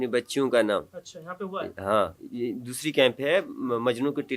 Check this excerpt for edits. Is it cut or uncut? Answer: uncut